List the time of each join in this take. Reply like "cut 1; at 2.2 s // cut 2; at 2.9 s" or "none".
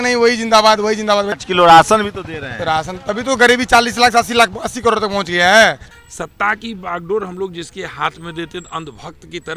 cut 1; at 1.4 s // cut 2; at 5.8 s

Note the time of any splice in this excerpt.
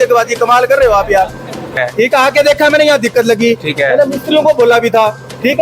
cut 1; at 1.8 s

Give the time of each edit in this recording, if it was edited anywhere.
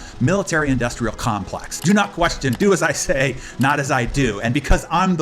cut 1; at 1.7 s

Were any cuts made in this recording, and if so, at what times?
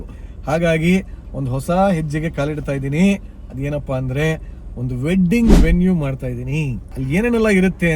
cut 1; at 6.9 s

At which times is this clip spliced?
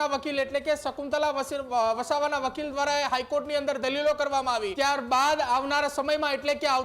cut 1; at 4.7 s

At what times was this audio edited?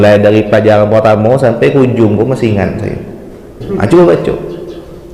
cut 1; at 3.6 s

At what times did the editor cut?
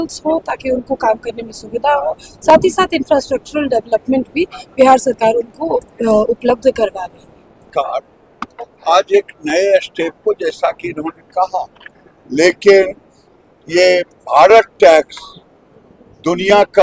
cut 1; at 7.7 s

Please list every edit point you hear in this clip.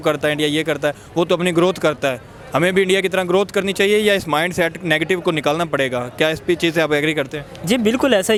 none

